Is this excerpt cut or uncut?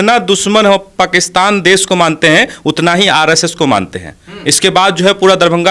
uncut